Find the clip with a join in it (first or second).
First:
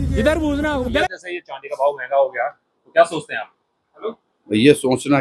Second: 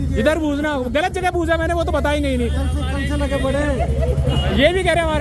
first